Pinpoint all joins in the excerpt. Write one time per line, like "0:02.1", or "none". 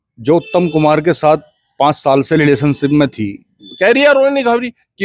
0:03.7